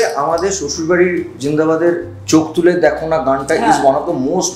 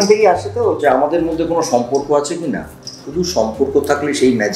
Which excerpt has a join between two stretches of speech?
second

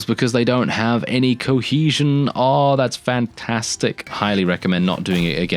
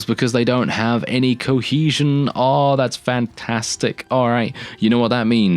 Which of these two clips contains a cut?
first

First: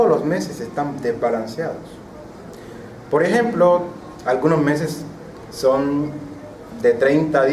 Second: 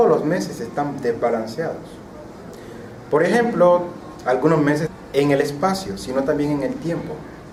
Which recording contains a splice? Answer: first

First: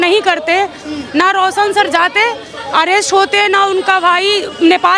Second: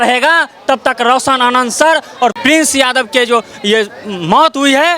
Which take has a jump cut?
second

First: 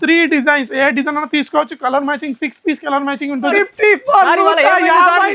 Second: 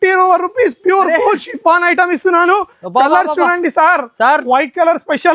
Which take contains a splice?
first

